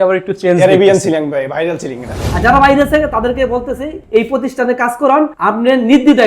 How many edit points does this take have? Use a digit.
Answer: 1